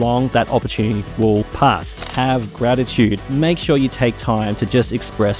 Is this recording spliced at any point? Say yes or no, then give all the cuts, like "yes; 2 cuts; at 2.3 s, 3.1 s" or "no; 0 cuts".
yes; 2 cuts; at 2.0 s, 3.2 s